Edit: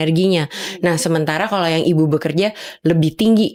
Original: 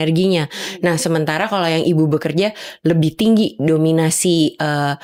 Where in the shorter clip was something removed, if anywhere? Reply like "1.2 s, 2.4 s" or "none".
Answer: none